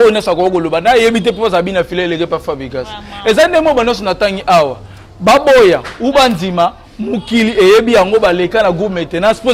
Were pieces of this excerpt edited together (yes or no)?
no